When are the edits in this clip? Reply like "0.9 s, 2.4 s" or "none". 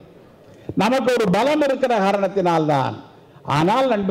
none